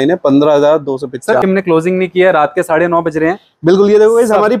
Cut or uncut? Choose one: cut